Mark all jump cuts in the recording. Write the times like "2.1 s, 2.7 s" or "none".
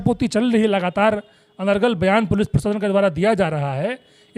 none